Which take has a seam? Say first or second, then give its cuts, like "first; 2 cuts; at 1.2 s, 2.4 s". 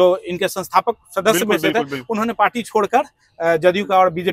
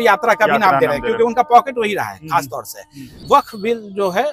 second; 1 cut; at 3.1 s